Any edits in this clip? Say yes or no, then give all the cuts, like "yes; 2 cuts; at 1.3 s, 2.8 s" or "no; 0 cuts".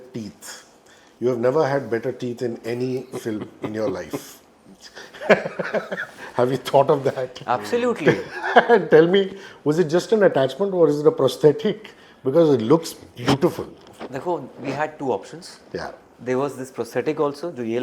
no; 0 cuts